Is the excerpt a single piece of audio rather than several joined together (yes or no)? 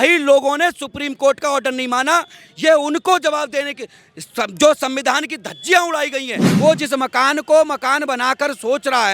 no